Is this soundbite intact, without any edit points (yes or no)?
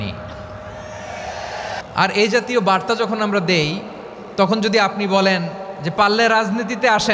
no